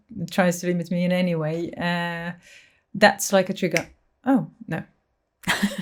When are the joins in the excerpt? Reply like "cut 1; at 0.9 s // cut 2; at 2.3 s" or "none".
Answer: none